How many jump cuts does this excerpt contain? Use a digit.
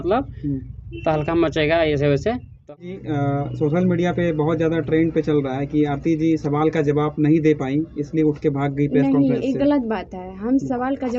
1